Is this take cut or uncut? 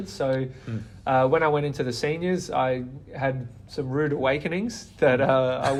uncut